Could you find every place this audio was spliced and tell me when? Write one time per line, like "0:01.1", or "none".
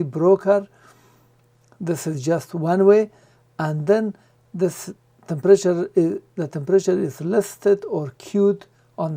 none